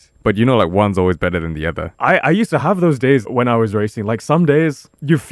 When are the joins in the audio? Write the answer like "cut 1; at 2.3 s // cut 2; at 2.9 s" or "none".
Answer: cut 1; at 1.9 s // cut 2; at 3.2 s